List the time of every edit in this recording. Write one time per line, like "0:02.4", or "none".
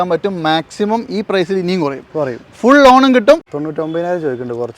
0:03.5

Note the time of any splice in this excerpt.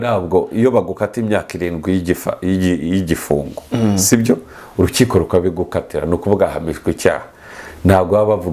none

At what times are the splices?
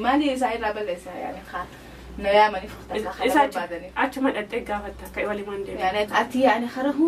0:06.1

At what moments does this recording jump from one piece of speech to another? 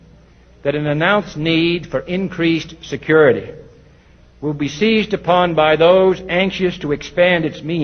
0:01.8

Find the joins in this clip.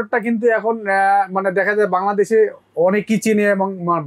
none

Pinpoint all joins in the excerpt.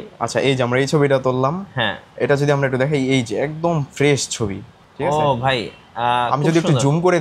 none

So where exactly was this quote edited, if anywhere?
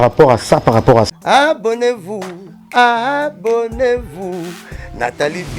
0:01.1

